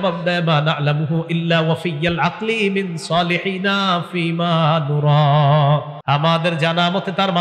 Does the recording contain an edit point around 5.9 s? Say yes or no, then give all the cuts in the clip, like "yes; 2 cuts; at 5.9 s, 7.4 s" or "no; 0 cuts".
yes; 1 cut; at 5.9 s